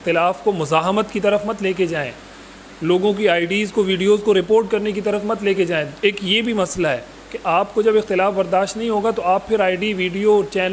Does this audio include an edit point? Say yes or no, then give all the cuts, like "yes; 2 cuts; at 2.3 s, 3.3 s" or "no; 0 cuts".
no; 0 cuts